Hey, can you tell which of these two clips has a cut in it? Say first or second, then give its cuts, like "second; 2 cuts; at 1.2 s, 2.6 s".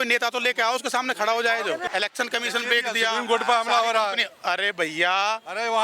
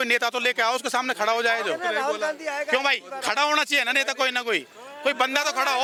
first; 1 cut; at 1.8 s